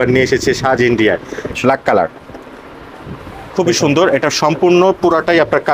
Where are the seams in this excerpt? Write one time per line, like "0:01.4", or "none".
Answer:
0:01.6